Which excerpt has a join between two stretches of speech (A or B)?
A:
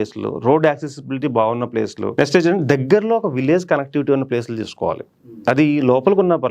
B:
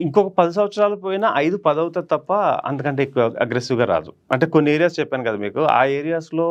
A